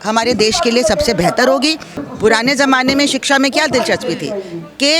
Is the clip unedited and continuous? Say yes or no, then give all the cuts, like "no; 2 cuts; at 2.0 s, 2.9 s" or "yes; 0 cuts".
no; 1 cut; at 2.0 s